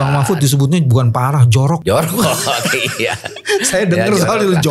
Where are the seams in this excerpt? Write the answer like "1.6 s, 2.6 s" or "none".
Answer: 1.8 s